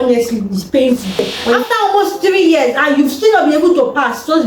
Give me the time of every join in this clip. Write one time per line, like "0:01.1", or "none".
0:01.4